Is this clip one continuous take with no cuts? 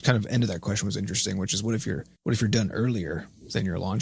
no; 1 cut; at 2.1 s

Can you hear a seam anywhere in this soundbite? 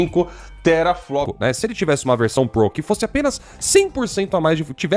yes; 1 cut; at 1.3 s

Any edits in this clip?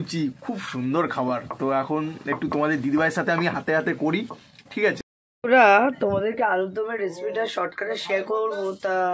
no; 0 cuts

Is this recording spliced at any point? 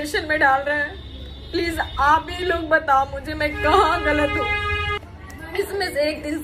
yes; 1 cut; at 5.0 s

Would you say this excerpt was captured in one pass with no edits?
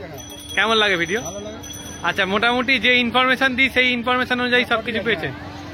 yes; 0 cuts

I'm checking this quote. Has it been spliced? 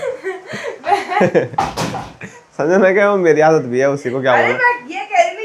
no; 0 cuts

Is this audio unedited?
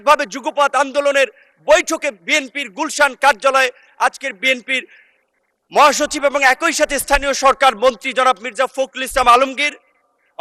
yes; 0 cuts

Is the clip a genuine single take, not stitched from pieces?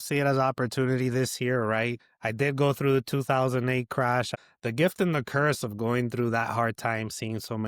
no; 2 cuts; at 2.0 s, 4.3 s

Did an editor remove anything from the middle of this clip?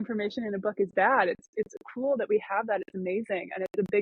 no; 0 cuts

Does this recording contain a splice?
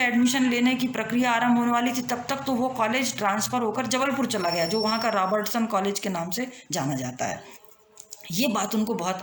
no; 0 cuts

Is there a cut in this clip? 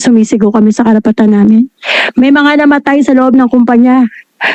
no; 0 cuts

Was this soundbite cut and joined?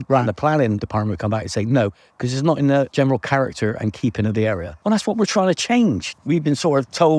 yes; 4 cuts; at 0.8 s, 2.9 s, 4.7 s, 6.1 s

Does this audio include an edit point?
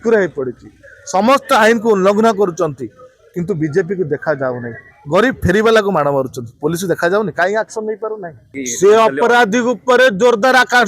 yes; 1 cut; at 8.5 s

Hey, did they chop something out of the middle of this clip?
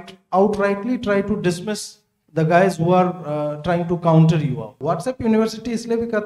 yes; 1 cut; at 4.8 s

